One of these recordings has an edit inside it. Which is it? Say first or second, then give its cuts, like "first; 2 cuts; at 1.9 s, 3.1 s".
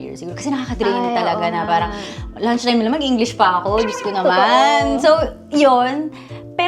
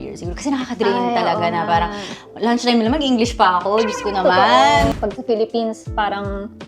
second; 1 cut; at 4.9 s